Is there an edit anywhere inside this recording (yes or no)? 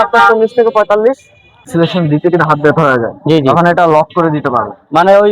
yes